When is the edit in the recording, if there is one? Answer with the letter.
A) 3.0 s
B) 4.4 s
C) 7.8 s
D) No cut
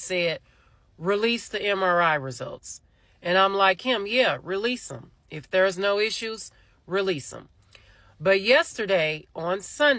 D